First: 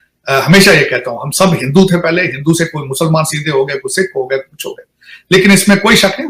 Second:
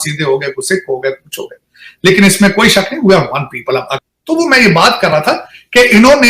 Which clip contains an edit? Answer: second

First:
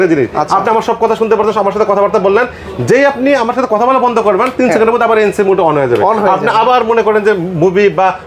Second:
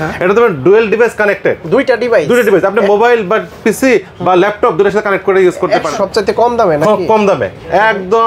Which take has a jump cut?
second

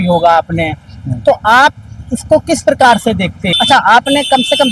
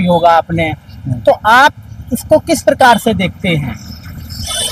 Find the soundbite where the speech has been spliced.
first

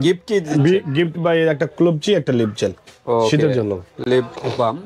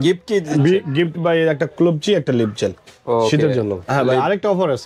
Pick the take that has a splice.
second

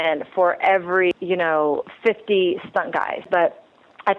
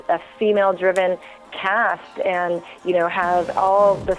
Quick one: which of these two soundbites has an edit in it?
first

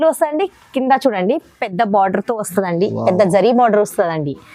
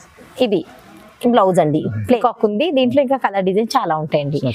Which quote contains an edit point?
second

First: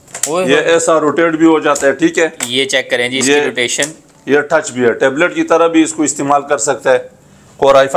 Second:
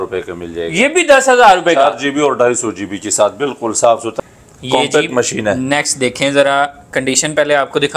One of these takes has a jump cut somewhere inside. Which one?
second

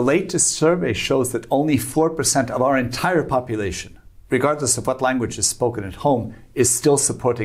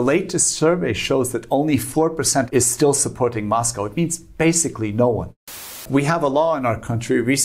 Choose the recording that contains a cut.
second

